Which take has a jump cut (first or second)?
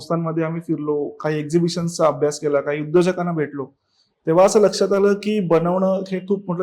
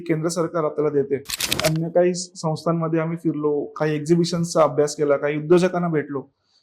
second